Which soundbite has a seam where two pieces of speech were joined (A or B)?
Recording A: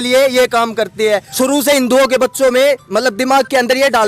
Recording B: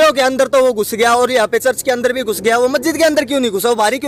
A